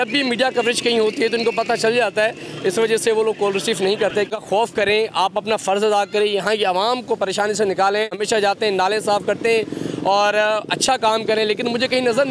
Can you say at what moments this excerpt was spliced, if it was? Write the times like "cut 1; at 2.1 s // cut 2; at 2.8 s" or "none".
cut 1; at 4.2 s // cut 2; at 8.2 s